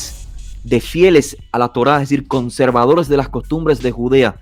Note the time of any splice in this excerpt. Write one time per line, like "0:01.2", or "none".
none